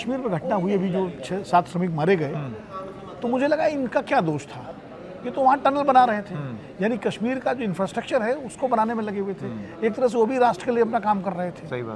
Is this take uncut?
yes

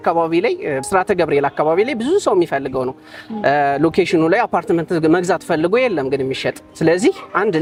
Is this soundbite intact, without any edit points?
yes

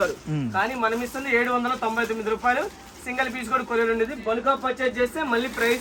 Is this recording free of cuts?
yes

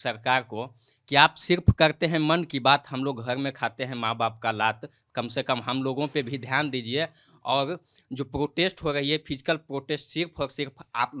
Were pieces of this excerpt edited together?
no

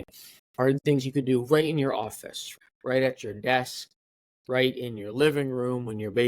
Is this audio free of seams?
no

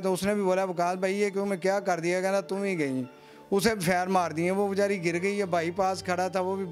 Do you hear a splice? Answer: no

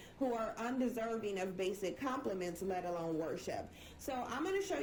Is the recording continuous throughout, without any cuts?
yes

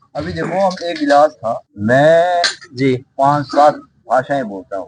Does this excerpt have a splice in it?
yes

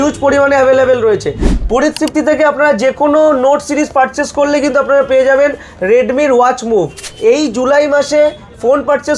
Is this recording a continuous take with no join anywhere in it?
no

